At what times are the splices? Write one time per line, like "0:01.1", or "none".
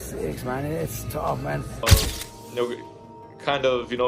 0:01.8